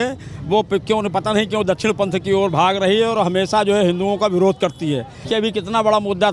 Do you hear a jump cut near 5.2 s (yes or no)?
yes